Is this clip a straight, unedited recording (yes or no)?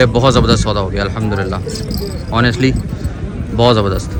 yes